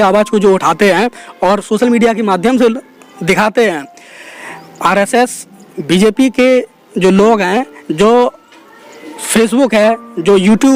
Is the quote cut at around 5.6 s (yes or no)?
no